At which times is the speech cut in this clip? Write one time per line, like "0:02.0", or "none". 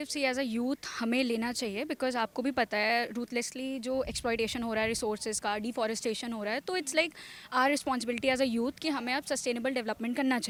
none